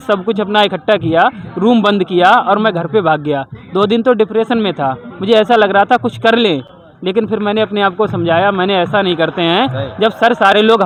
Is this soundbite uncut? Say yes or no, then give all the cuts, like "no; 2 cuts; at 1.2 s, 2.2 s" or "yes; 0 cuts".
yes; 0 cuts